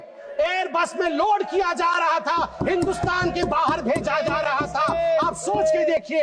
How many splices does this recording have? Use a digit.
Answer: 0